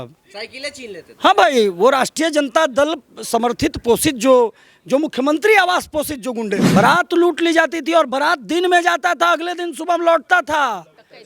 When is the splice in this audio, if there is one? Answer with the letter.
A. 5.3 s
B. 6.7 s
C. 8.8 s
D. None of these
B